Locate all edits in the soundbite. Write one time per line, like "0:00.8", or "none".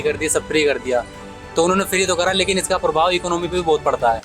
none